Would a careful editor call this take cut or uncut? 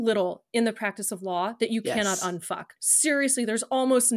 cut